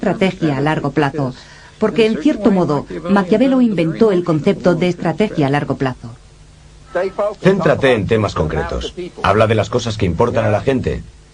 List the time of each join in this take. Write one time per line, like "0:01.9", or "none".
0:09.4